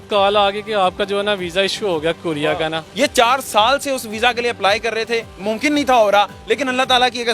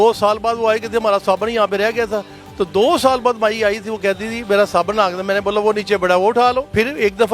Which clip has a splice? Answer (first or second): first